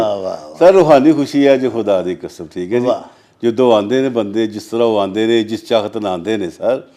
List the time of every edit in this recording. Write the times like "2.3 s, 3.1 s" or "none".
none